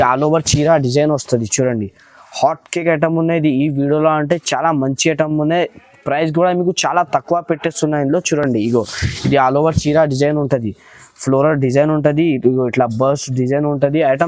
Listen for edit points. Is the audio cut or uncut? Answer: uncut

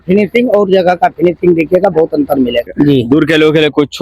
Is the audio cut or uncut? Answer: cut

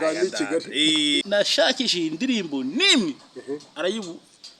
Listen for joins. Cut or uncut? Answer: cut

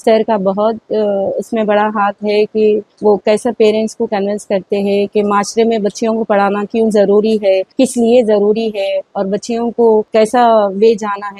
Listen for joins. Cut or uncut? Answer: cut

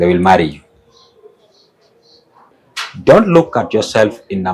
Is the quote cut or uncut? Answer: cut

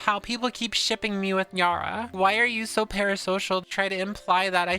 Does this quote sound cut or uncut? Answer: cut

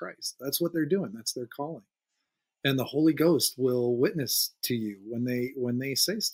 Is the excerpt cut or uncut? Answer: uncut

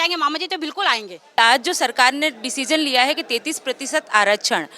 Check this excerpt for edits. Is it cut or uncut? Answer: cut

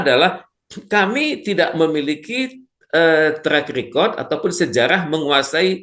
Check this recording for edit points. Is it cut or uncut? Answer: uncut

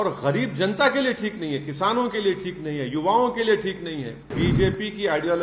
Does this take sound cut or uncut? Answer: cut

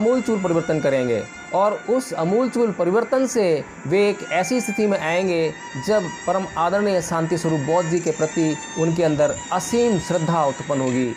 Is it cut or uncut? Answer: uncut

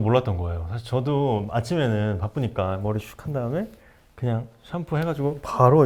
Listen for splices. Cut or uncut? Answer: uncut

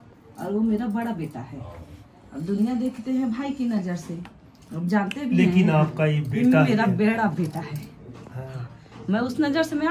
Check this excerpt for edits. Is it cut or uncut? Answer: uncut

